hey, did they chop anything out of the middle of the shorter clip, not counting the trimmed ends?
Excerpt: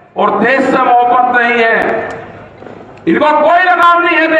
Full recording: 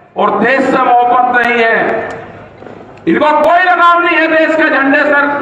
no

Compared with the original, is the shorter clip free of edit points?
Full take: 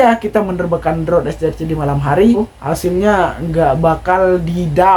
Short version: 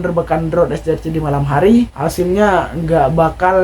no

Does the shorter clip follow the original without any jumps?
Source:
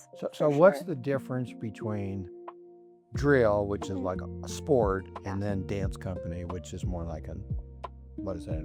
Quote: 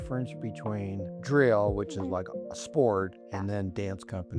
no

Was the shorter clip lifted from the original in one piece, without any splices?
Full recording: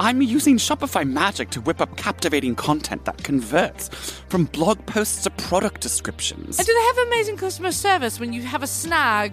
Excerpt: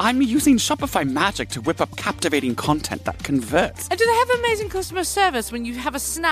no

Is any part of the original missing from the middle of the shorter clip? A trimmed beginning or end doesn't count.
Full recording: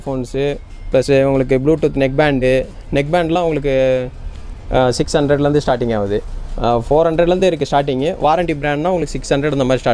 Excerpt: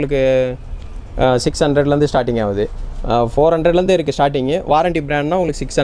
no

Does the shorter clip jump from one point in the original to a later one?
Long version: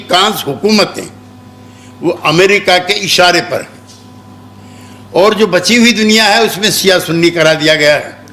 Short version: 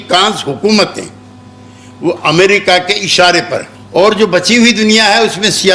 yes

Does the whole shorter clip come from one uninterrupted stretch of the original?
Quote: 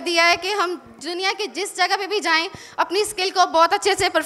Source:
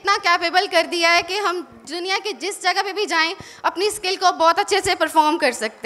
yes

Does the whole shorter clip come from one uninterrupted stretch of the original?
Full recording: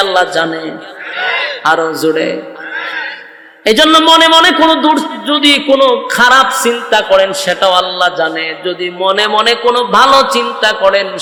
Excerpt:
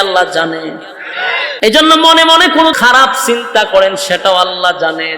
no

